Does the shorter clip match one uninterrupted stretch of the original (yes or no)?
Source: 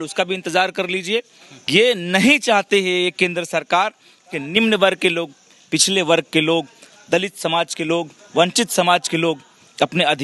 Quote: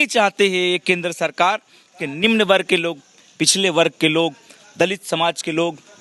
yes